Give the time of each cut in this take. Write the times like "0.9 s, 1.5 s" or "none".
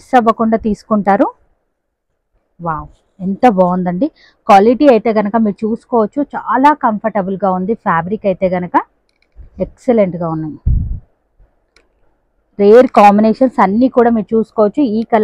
none